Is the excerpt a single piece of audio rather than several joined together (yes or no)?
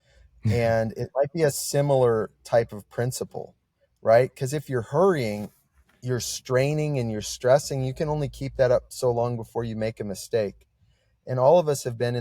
yes